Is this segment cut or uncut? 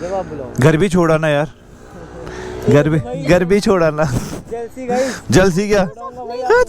uncut